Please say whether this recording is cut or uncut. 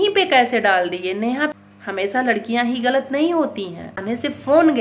cut